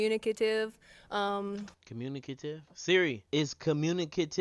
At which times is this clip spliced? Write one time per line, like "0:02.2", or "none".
0:03.2